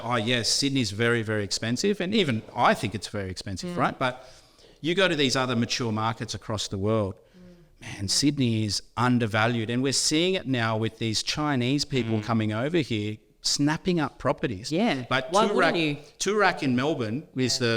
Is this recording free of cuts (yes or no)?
yes